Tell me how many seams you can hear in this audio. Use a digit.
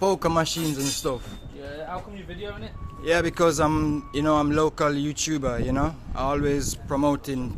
0